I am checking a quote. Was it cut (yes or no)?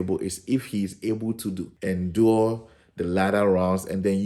yes